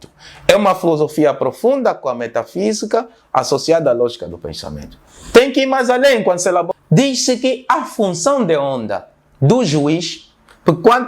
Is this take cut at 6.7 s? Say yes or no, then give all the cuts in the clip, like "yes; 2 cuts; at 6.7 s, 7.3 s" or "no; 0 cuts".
yes; 1 cut; at 6.7 s